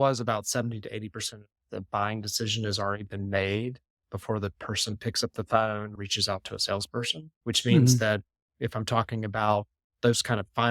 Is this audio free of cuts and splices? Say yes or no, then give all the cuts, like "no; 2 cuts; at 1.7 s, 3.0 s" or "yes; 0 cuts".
no; 2 cuts; at 5.9 s, 7.2 s